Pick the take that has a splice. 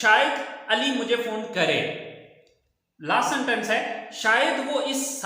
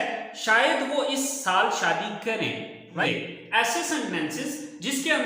second; 1 cut; at 3.0 s

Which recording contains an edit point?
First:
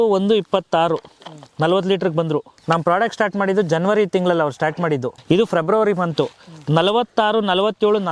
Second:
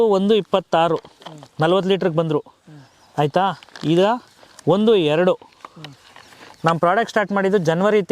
first; 2 cuts; at 2.5 s, 5.1 s

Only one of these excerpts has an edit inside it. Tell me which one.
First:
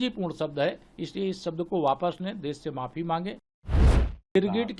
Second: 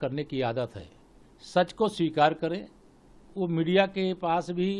first; 1 cut; at 3.8 s

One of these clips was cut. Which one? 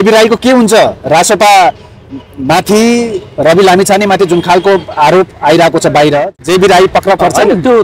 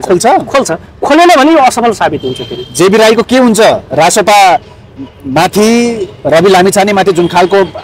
first; 1 cut; at 6.3 s

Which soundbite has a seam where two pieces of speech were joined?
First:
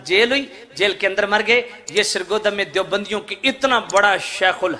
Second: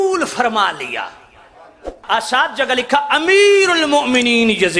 second; 1 cut; at 2.0 s

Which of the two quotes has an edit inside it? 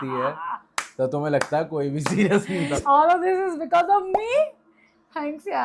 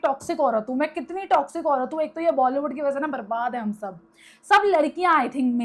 first; 1 cut; at 2.8 s

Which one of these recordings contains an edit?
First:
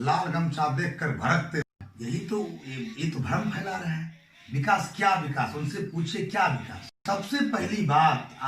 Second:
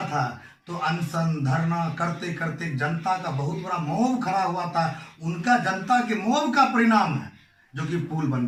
first; 2 cuts; at 1.7 s, 7.0 s

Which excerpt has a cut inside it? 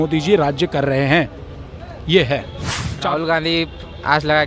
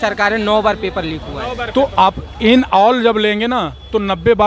first; 1 cut; at 2.6 s

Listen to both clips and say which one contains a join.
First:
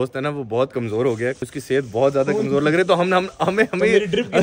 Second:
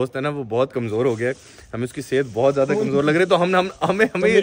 first; 1 cut; at 1.5 s

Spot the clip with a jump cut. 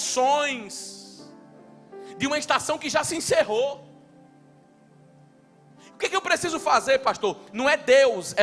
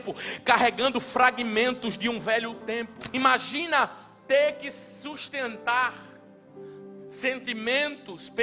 second; 1 cut; at 3.0 s

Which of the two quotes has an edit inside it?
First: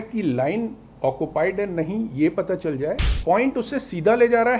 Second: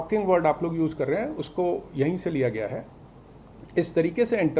first; 1 cut; at 3.1 s

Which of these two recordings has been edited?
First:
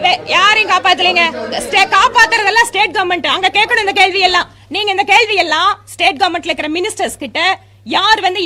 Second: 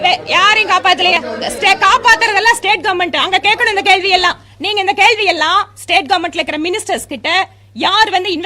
second; 1 cut; at 1.1 s

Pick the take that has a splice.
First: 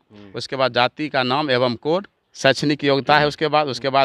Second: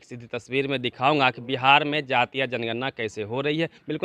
first; 1 cut; at 2.2 s

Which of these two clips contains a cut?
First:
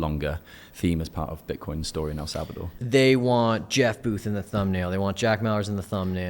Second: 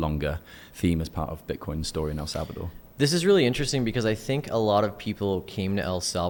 first; 1 cut; at 2.9 s

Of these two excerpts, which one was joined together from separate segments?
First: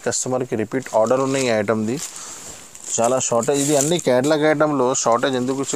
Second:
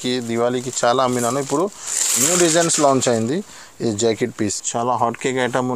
second; 1 cut; at 4.4 s

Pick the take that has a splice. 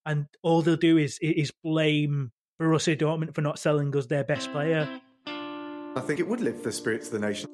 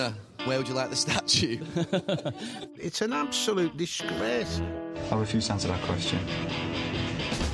first; 1 cut; at 5.0 s

